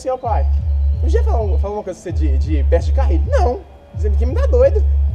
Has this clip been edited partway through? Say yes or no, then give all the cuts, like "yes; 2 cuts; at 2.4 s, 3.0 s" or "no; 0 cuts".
no; 0 cuts